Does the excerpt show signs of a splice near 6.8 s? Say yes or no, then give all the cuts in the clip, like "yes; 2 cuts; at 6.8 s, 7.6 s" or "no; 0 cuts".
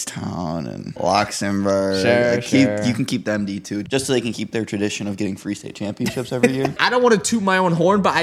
yes; 3 cuts; at 0.9 s, 3.8 s, 6.8 s